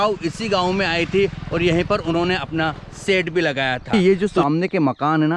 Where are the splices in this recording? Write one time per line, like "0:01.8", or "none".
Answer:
0:03.9